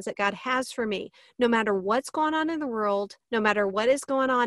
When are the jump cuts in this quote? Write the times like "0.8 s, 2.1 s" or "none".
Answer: 3.2 s